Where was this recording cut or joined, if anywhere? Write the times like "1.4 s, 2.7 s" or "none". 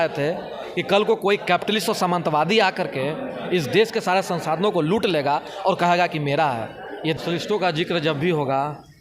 7.2 s